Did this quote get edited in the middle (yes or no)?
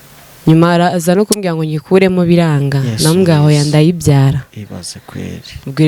no